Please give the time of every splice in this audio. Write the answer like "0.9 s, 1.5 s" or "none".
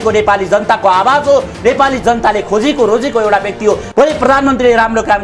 none